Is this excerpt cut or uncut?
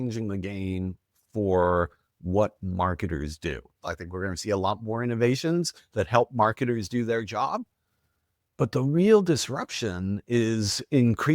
cut